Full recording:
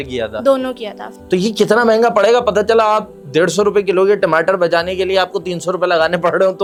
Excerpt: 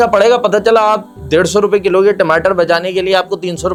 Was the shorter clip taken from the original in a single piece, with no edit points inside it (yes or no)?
yes